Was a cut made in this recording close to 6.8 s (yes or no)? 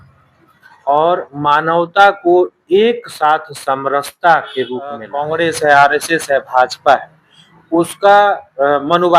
no